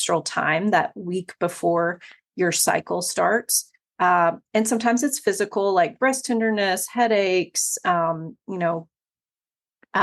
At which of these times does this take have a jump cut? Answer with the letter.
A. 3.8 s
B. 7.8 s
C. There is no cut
C